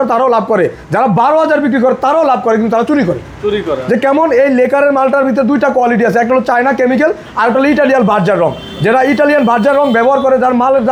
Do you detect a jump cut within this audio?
no; 0 cuts

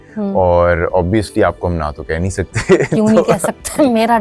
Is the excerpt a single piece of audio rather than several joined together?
yes; 0 cuts

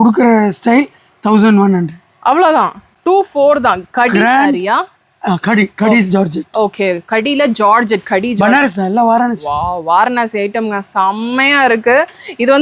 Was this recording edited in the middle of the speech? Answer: yes; 1 cut; at 2.9 s

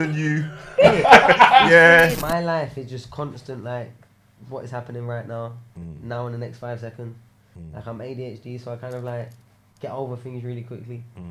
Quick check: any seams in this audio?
yes; 1 cut; at 2.1 s

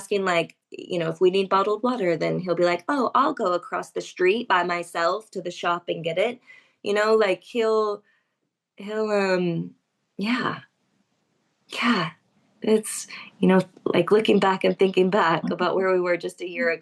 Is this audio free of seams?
yes; 0 cuts

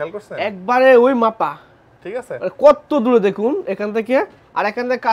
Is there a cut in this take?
no; 0 cuts

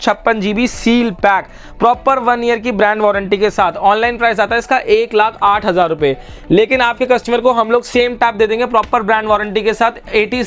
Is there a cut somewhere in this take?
no; 0 cuts

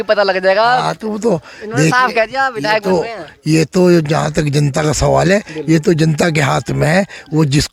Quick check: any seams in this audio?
no; 0 cuts

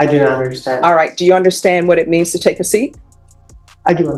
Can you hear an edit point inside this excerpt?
no; 0 cuts

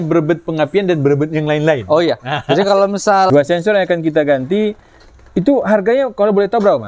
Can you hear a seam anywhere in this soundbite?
yes; 1 cut; at 3.3 s

